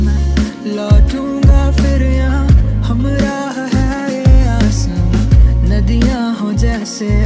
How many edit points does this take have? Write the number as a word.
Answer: zero